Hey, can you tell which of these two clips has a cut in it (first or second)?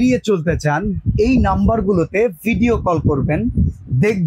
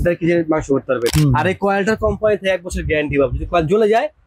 second